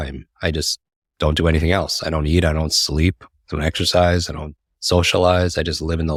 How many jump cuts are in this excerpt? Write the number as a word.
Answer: zero